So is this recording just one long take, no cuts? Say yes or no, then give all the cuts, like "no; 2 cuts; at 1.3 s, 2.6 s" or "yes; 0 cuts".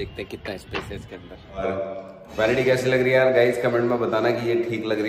no; 1 cut; at 1.6 s